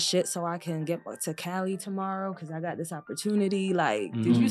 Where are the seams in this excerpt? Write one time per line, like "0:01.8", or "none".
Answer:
none